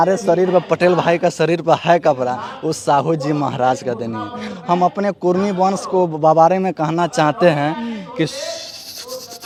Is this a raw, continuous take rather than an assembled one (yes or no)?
yes